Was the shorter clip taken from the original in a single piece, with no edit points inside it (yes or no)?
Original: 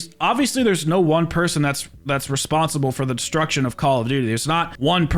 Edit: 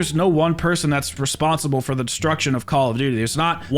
no